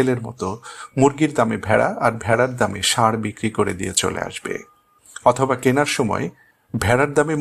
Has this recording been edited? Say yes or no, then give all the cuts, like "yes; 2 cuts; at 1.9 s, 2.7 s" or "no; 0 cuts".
no; 0 cuts